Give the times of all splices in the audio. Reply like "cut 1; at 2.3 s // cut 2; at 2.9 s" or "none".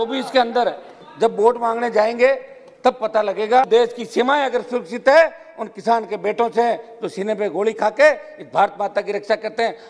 cut 1; at 3.7 s